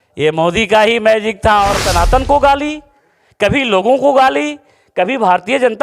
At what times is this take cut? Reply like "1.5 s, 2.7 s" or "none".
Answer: 1.8 s